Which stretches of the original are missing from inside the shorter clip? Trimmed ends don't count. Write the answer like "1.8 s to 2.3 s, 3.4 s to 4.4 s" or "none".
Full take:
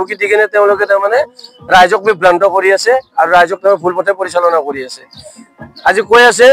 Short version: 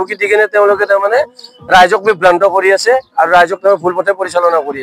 none

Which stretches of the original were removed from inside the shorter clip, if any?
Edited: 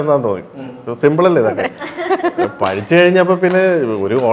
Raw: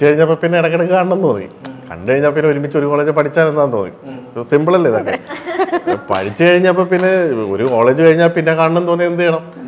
none

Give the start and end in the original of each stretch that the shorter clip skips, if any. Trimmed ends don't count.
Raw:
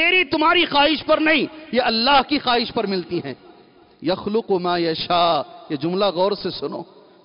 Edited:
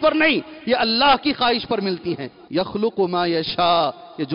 3.4 s to 3.9 s

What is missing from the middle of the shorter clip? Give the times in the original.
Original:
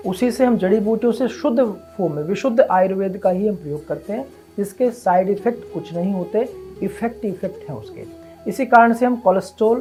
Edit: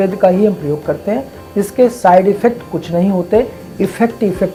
none

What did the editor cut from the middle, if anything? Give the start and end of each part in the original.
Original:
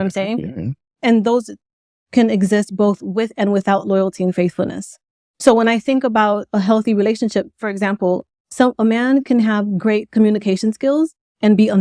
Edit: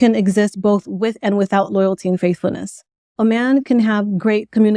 5.3 s to 8.8 s

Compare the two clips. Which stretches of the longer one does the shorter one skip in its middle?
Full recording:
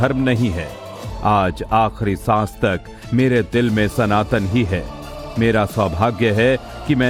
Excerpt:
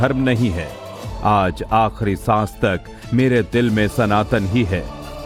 none

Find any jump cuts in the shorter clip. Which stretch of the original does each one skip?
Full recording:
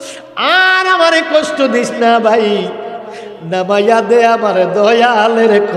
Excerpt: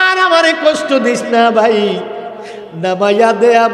none

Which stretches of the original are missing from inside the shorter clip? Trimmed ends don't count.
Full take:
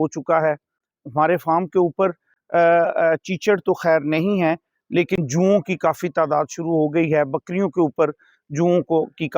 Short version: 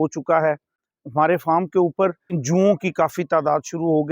2.3 s to 5.2 s

